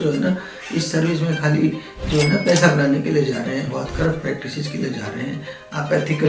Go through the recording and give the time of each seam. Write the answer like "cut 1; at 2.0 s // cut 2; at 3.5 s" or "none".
none